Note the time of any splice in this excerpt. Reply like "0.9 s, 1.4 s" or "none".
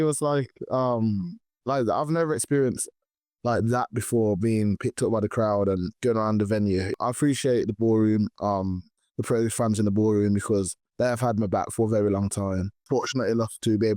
6.9 s, 12.8 s